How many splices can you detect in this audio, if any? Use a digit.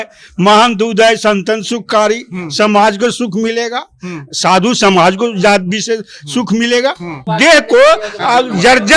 1